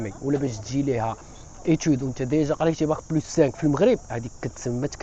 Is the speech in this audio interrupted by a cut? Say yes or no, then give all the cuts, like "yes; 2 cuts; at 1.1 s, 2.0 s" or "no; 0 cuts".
no; 0 cuts